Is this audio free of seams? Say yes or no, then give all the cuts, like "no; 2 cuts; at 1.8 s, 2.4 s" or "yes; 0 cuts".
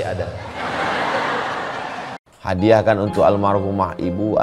no; 1 cut; at 2.2 s